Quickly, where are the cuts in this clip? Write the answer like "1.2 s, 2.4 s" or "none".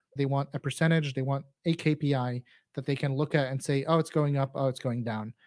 none